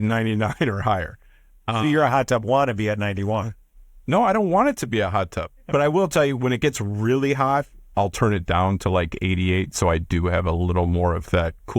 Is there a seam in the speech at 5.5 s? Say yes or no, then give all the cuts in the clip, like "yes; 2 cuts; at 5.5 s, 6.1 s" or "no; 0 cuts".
yes; 2 cuts; at 5.5 s, 7.8 s